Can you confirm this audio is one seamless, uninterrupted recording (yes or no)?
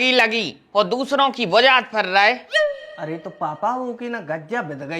yes